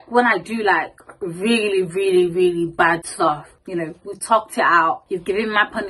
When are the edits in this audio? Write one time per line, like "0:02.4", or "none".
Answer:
0:03.5
0:05.0